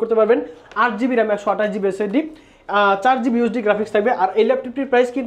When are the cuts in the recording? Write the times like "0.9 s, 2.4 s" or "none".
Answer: none